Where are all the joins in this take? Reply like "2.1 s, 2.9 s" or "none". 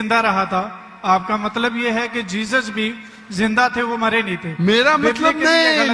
none